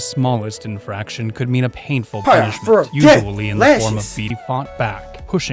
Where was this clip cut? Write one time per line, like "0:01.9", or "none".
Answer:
0:04.3